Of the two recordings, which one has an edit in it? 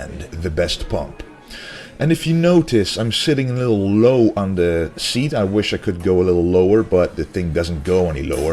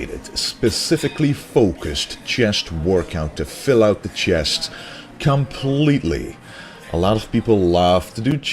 second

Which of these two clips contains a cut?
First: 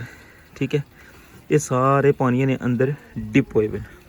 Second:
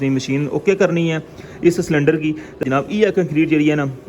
second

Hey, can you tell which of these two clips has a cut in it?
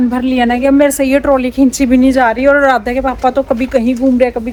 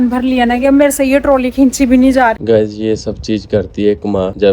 second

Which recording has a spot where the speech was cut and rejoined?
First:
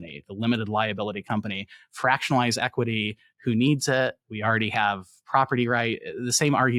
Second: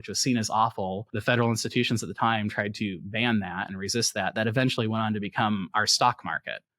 second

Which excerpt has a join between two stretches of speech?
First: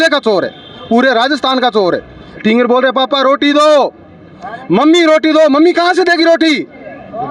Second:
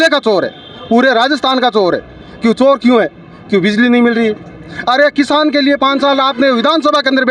first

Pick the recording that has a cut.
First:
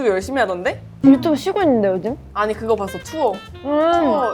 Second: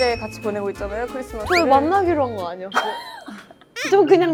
first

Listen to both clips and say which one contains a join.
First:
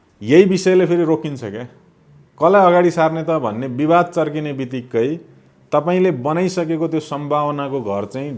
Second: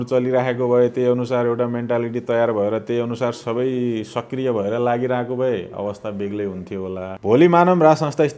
second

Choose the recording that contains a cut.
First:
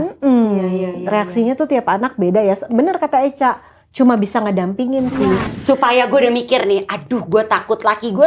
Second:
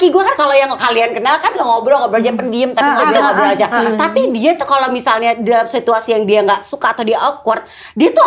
first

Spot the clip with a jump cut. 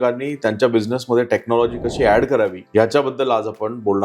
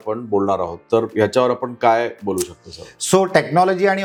first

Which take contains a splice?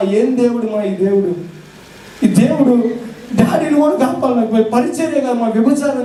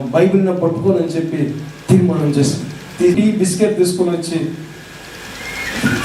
second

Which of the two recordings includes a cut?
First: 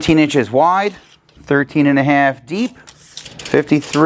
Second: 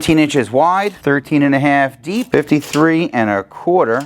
second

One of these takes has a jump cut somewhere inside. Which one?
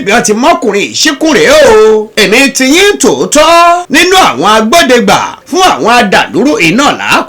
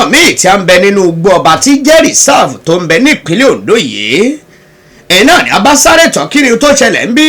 first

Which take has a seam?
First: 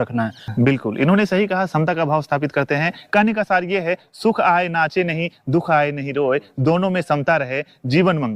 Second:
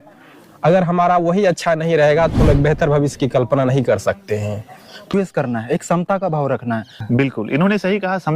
second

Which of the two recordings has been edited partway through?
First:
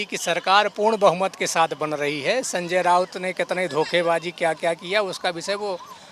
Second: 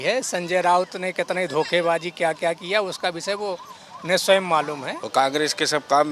second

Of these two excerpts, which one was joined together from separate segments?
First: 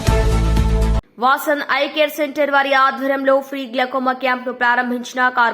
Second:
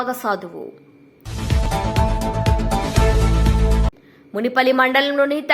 first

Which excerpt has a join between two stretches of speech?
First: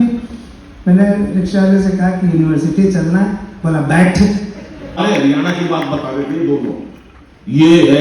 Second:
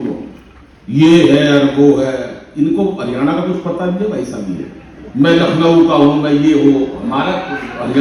first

